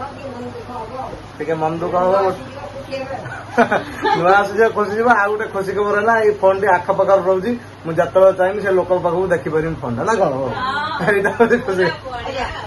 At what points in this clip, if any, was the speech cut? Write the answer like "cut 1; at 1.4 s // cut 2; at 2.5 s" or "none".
none